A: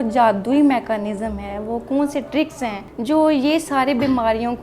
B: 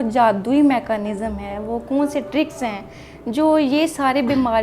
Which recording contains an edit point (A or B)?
A